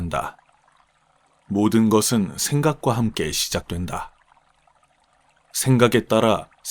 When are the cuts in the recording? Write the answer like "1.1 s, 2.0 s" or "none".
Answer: 4.1 s, 5.6 s